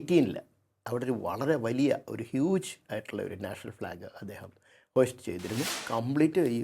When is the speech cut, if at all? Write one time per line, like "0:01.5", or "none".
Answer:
0:05.7